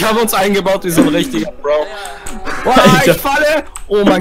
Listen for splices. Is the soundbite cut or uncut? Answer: cut